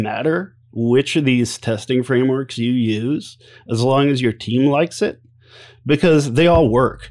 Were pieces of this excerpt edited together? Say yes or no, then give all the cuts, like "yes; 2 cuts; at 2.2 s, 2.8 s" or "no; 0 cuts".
no; 0 cuts